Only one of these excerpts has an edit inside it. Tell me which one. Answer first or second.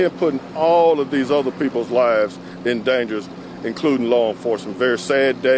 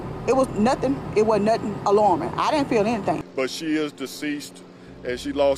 second